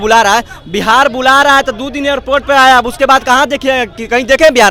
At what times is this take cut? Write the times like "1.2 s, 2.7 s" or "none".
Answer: none